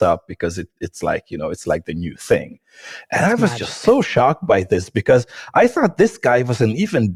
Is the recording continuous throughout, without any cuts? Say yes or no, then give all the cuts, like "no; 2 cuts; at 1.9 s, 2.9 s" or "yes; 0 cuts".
yes; 0 cuts